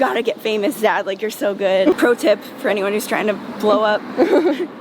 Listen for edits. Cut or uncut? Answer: cut